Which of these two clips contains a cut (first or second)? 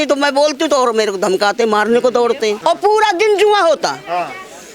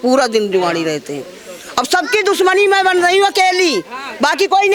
first